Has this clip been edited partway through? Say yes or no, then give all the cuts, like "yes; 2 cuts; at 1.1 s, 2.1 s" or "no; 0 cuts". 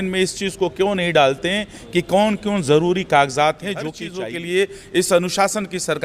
yes; 1 cut; at 4.0 s